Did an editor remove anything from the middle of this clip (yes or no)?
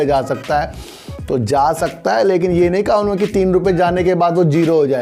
no